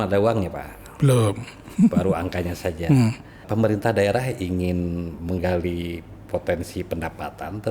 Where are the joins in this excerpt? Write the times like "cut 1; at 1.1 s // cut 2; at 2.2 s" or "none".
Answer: cut 1; at 3.4 s